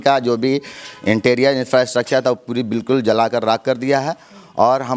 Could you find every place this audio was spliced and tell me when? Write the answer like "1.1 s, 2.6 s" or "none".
none